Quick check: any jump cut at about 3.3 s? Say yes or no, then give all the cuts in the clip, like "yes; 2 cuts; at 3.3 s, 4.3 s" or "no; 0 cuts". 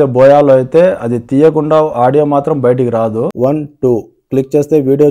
yes; 1 cut; at 3.3 s